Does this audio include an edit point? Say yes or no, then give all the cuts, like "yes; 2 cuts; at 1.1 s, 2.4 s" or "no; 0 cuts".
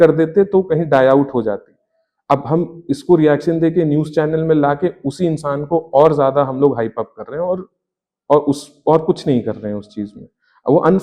no; 0 cuts